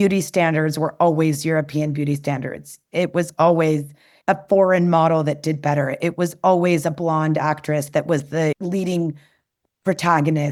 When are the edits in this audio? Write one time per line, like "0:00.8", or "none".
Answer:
none

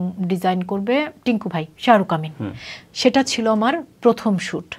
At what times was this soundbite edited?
none

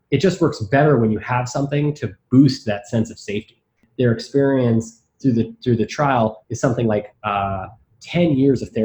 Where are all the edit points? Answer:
0:03.8

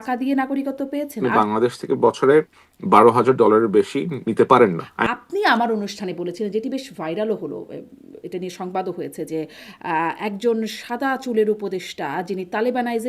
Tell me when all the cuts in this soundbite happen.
0:01.2
0:04.9

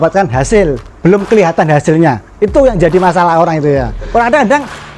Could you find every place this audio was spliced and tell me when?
0:04.0

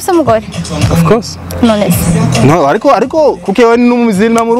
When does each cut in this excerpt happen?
none

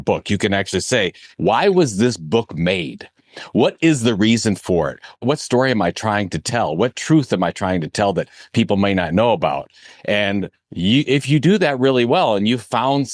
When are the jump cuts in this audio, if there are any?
0:01.3
0:05.2

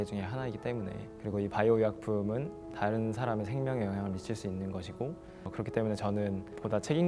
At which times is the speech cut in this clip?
0:05.5

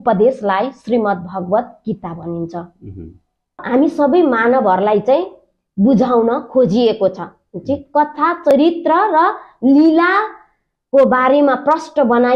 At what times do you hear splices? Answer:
0:03.6

